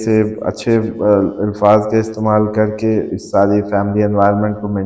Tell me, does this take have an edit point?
no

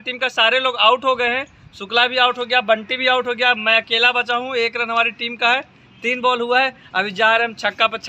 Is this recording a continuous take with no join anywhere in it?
yes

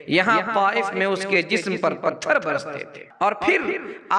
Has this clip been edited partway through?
yes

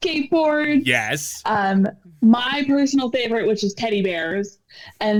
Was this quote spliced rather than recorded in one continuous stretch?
no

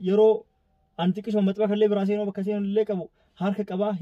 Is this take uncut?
yes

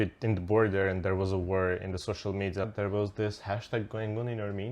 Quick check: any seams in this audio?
yes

